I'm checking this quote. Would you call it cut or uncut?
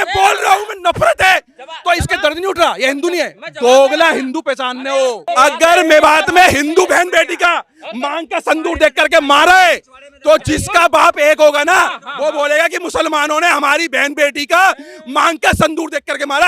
cut